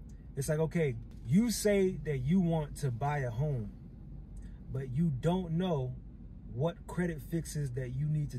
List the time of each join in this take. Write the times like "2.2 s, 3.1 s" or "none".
1.1 s